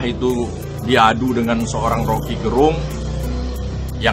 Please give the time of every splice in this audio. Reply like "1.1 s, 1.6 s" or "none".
none

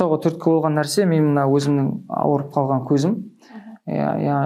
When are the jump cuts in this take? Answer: none

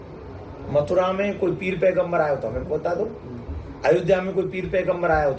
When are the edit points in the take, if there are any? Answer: none

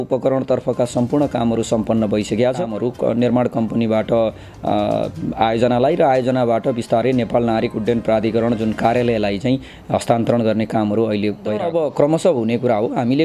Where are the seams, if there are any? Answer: 2.7 s, 11.6 s

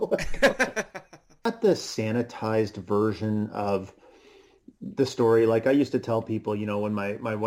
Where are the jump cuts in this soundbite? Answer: 1.4 s

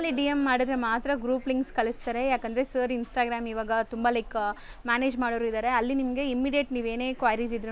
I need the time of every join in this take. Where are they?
none

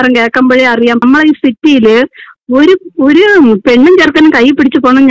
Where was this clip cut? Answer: 1.0 s

